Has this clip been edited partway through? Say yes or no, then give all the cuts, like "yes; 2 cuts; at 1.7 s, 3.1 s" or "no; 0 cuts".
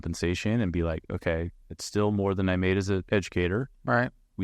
yes; 1 cut; at 3.0 s